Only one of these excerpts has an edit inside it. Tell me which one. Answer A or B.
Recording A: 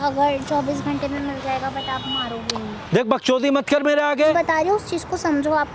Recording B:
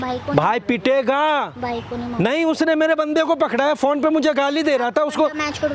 A